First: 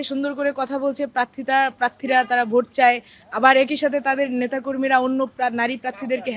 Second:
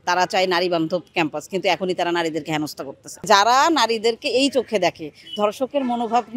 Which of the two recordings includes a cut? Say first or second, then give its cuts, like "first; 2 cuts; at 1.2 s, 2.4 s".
second; 1 cut; at 3.3 s